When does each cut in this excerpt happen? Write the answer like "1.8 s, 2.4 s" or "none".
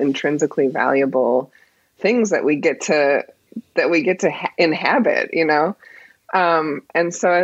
none